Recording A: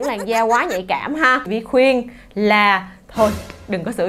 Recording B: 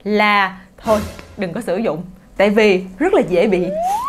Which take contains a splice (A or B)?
A